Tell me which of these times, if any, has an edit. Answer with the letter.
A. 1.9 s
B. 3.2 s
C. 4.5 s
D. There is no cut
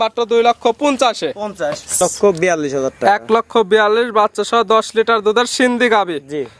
A